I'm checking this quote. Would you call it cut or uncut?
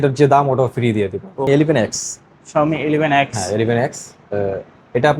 cut